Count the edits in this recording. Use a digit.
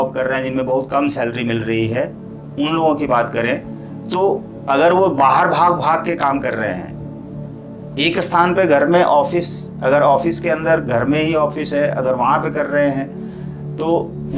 0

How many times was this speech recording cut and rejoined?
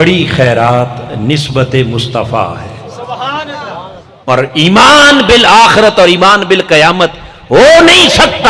1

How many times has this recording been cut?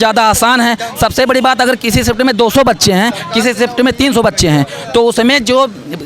0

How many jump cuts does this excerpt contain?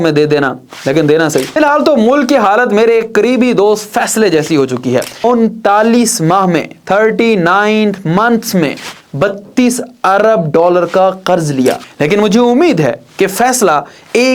3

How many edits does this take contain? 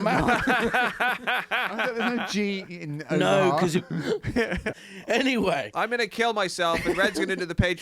1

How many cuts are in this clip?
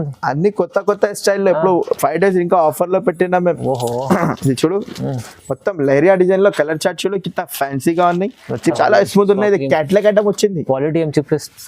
1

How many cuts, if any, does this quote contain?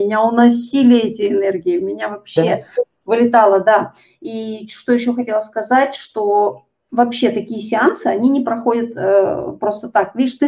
0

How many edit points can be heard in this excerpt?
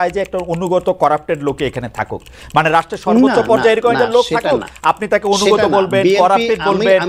0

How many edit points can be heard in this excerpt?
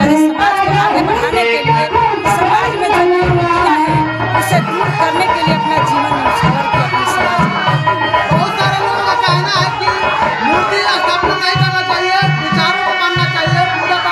0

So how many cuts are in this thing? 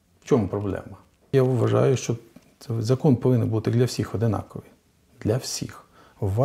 1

